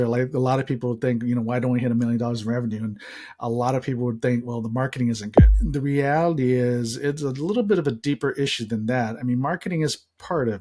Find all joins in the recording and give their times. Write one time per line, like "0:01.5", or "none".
0:05.5